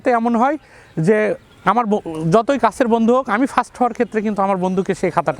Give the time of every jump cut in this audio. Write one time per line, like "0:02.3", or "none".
none